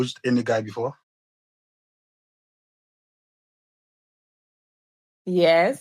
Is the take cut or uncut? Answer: uncut